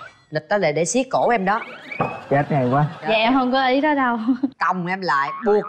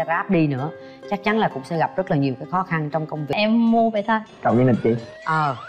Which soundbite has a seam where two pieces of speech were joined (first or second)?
second